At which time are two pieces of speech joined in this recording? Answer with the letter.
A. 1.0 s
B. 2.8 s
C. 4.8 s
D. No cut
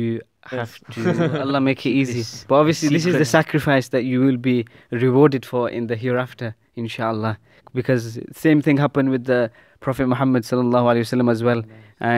A